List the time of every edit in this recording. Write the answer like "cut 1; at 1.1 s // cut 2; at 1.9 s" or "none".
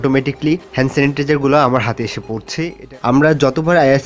cut 1; at 2.8 s